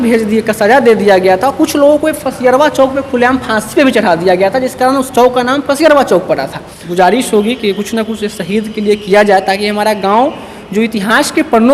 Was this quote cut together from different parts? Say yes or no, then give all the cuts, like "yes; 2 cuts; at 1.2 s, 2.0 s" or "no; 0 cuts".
yes; 1 cut; at 6.8 s